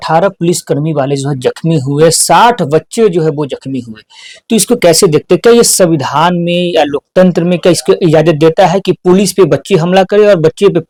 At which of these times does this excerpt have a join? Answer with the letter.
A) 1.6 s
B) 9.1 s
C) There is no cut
C